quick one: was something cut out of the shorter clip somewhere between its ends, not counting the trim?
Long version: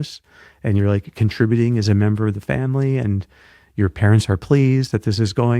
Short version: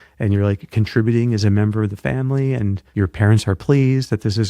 yes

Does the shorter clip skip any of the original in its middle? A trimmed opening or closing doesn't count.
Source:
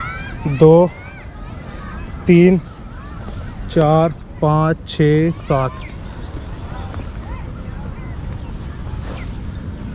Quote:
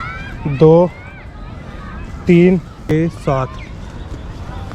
yes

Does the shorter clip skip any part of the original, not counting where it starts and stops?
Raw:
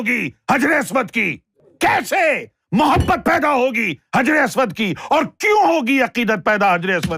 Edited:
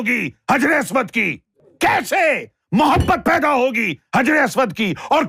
no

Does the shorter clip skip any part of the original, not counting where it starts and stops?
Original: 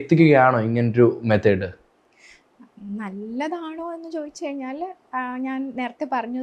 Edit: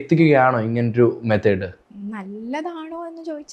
yes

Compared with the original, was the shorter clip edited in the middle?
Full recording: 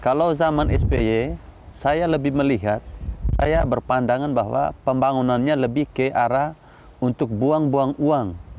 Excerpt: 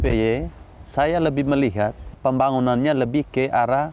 yes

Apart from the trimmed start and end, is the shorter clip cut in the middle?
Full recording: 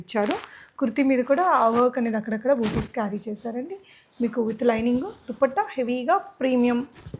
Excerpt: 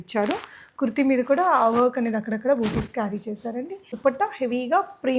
yes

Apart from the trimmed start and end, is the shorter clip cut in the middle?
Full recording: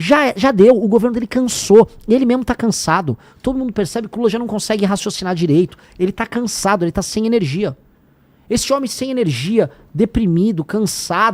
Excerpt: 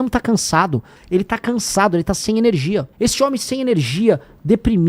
yes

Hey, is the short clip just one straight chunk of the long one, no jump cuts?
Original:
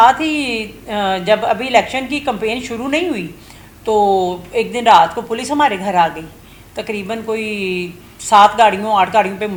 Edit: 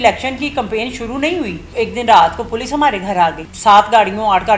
no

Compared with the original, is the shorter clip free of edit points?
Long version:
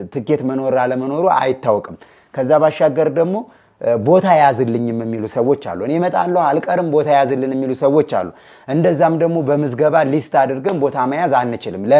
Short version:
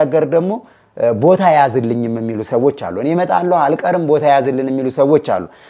yes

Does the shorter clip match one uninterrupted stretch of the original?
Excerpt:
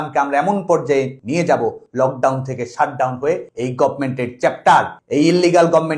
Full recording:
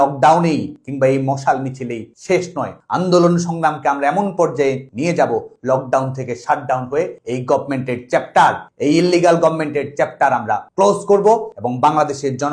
yes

